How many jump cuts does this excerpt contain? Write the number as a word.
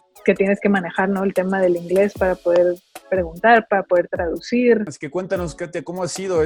one